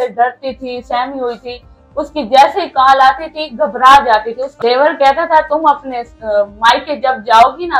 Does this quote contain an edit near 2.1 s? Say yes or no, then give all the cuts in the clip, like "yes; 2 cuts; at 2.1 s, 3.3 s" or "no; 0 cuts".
no; 1 cut; at 4.4 s